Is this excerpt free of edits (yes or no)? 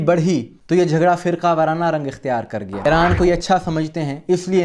no